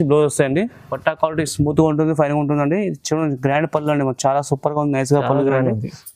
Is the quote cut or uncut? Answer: cut